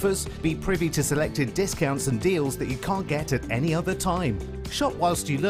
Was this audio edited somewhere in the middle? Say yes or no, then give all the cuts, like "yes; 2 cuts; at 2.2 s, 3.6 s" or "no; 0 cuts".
no; 0 cuts